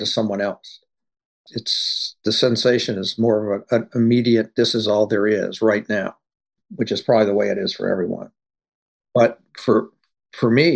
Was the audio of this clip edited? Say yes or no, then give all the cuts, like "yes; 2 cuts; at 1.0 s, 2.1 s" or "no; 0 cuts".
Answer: yes; 1 cut; at 1.3 s